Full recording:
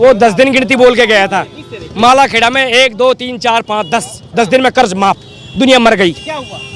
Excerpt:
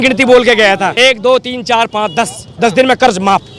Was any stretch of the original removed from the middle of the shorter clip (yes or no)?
yes